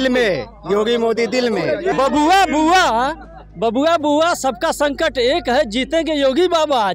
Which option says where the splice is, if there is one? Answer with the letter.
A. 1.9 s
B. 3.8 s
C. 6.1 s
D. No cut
A